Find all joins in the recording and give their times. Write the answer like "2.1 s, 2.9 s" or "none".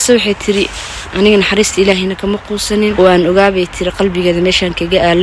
2.9 s